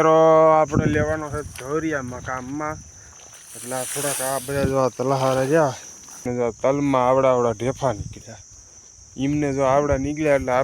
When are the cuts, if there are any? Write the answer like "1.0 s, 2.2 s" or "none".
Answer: 6.3 s